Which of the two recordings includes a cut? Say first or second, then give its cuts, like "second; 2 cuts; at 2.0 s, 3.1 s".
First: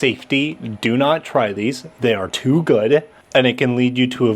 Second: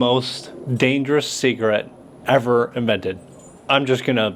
first; 1 cut; at 3.2 s